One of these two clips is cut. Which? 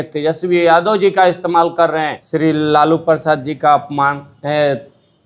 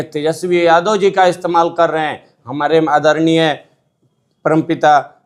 first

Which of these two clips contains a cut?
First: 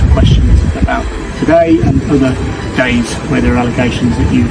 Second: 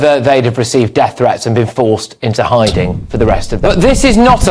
second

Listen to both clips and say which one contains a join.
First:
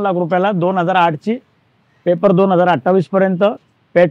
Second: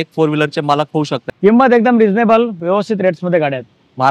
second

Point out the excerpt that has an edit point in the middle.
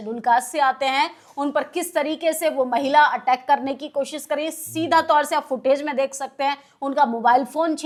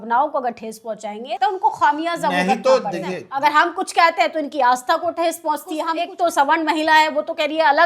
second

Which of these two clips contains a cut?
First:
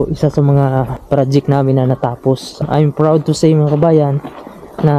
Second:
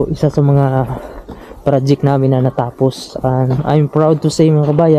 first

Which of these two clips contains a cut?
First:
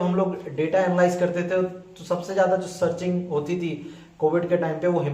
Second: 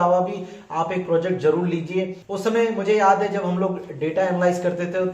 second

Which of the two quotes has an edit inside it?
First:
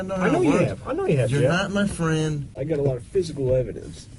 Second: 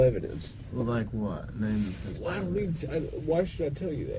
first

